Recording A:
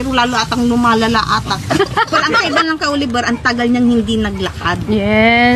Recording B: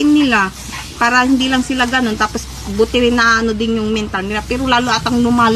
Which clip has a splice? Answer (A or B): A